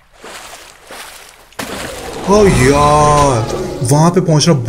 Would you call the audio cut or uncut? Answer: cut